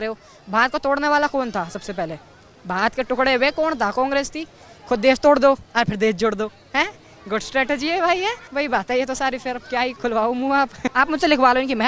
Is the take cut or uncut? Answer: cut